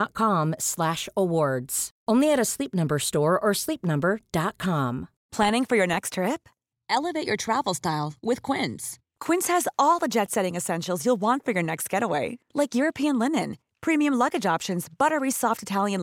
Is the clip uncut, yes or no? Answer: no